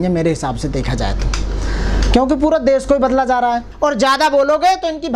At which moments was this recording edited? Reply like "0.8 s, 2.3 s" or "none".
3.7 s